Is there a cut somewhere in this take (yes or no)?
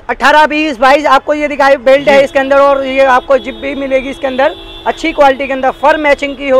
no